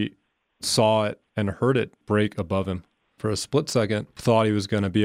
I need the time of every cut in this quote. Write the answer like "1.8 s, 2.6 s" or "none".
1.8 s